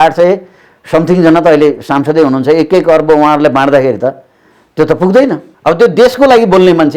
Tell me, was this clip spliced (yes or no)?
yes